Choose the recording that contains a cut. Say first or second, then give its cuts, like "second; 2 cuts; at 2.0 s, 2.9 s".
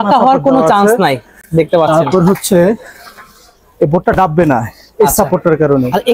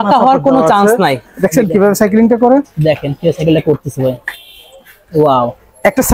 second; 1 cut; at 1.3 s